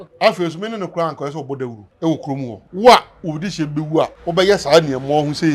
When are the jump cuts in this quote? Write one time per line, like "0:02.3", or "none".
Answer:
0:01.8
0:02.6
0:04.2